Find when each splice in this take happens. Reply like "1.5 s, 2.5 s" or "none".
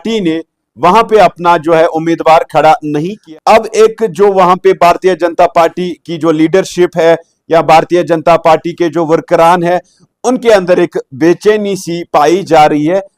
3.2 s